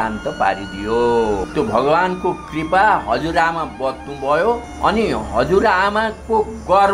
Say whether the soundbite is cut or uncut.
cut